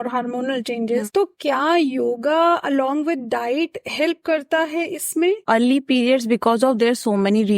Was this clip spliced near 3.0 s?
no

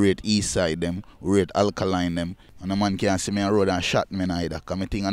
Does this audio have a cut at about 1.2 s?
no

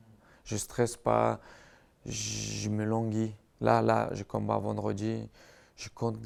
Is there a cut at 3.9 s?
no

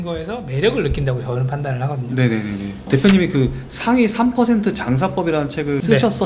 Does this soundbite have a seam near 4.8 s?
no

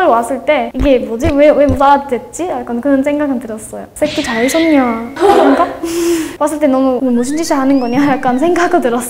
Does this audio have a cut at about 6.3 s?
yes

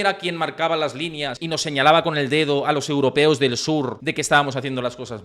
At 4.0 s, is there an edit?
yes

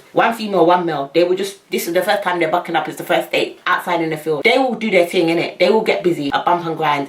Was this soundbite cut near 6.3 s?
yes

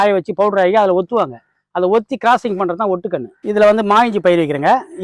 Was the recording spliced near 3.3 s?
yes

